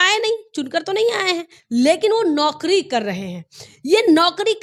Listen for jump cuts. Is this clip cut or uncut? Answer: uncut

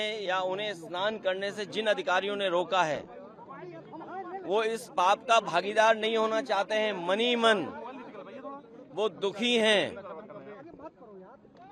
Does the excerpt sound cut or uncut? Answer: uncut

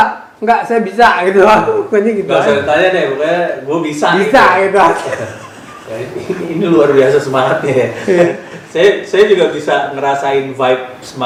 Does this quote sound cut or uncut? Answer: uncut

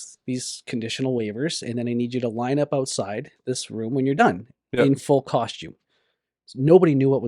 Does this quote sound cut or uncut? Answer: uncut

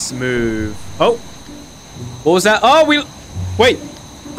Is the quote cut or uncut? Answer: uncut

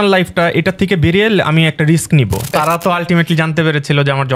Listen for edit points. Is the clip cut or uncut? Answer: cut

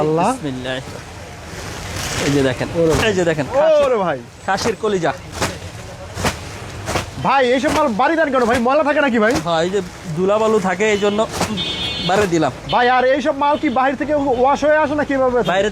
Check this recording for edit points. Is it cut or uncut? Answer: uncut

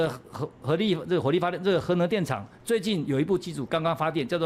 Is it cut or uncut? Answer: uncut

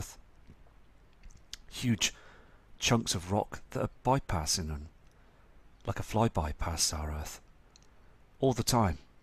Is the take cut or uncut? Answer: cut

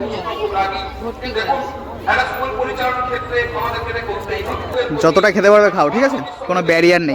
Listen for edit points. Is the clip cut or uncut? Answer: cut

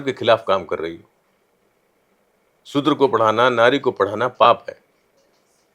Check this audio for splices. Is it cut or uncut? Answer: uncut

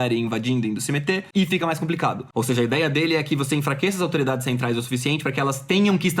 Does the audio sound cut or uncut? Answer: cut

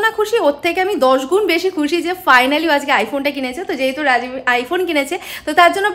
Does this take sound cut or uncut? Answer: uncut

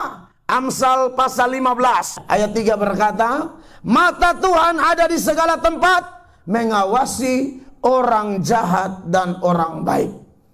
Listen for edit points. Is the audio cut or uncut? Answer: cut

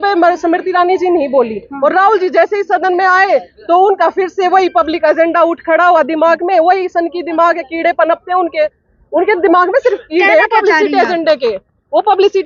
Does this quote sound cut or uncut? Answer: uncut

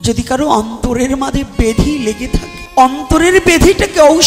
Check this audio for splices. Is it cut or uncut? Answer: cut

